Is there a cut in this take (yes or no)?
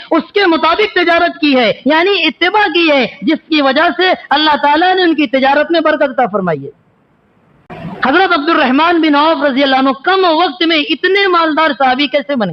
yes